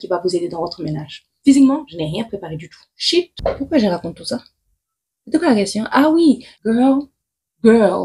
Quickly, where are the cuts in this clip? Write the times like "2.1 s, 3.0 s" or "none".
1.3 s, 3.3 s, 6.5 s